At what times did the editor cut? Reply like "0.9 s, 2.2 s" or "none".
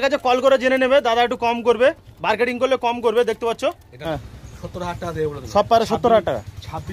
3.9 s